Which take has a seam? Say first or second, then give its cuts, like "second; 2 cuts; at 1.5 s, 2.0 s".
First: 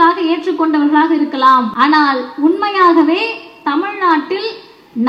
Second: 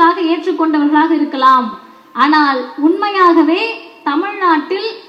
first; 1 cut; at 1.7 s